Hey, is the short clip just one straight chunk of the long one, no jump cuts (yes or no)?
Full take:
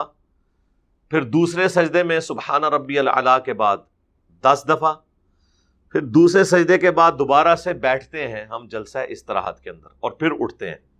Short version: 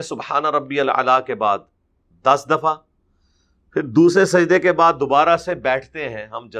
yes